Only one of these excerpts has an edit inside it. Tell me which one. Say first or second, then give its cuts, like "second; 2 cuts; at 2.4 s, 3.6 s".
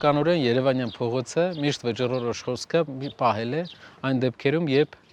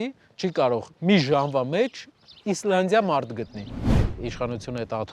second; 2 cuts; at 0.9 s, 4.1 s